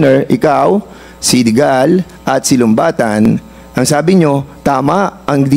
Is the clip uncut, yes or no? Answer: yes